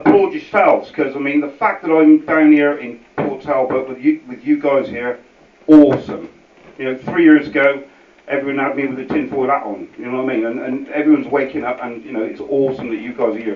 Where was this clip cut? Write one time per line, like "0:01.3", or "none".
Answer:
0:07.2